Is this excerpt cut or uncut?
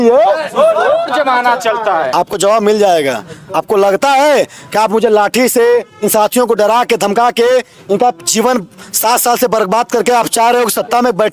uncut